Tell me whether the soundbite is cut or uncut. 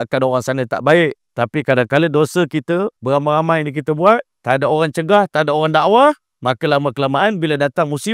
cut